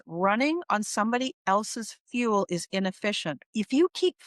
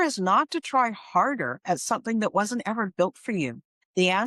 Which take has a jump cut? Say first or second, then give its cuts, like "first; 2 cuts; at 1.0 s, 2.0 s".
first; 1 cut; at 3.4 s